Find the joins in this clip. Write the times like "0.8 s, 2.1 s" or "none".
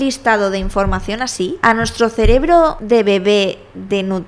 1.6 s, 2.8 s